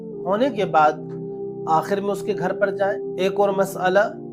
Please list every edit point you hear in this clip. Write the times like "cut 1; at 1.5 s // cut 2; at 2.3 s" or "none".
cut 1; at 3.0 s